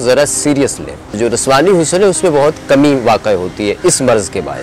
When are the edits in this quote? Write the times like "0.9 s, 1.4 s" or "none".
1.2 s